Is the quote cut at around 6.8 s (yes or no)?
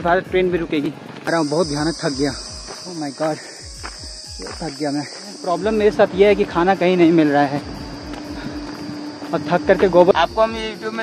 no